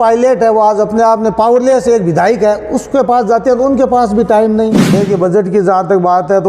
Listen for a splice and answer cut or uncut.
cut